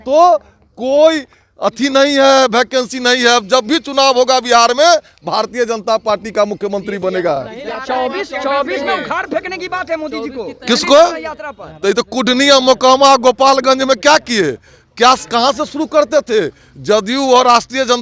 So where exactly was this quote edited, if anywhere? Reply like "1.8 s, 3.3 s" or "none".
none